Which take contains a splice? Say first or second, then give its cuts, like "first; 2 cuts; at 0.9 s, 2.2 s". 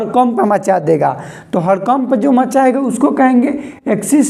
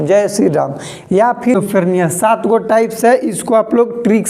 second; 1 cut; at 1.6 s